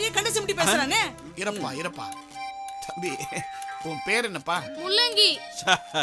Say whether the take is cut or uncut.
cut